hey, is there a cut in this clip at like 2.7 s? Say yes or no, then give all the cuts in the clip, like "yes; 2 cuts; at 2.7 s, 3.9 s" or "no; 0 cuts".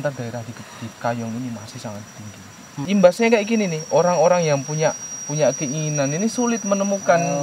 yes; 1 cut; at 2.7 s